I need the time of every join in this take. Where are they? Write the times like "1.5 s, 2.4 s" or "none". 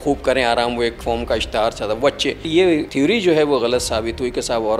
1.0 s, 2.6 s